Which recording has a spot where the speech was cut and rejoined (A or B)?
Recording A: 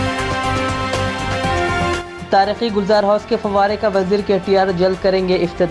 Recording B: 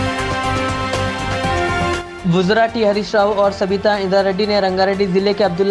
B